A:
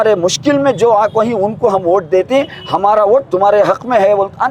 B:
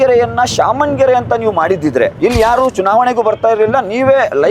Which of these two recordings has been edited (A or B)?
B